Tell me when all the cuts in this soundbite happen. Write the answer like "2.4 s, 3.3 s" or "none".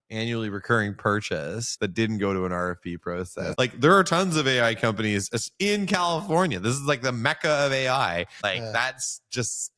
1.7 s, 3.5 s, 8.4 s